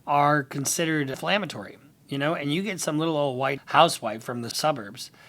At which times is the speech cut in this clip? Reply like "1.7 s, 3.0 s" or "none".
1.1 s, 3.6 s, 4.5 s